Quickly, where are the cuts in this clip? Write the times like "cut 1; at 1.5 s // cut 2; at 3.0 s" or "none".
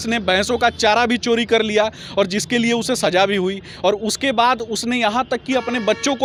none